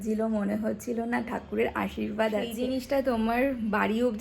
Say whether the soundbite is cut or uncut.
cut